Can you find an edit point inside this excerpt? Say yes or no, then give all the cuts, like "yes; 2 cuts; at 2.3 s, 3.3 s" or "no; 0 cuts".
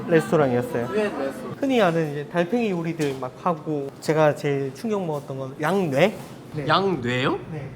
yes; 3 cuts; at 1.5 s, 5.5 s, 6.4 s